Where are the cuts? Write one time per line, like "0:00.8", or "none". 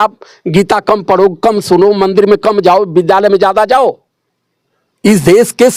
none

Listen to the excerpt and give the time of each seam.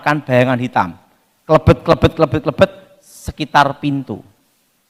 none

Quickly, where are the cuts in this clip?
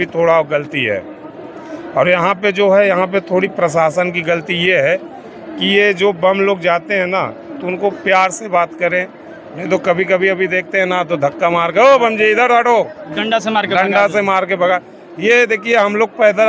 none

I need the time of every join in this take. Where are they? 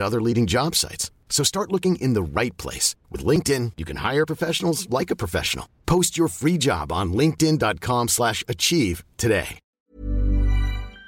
0:09.6

